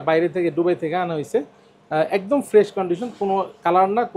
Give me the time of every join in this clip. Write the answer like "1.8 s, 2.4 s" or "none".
none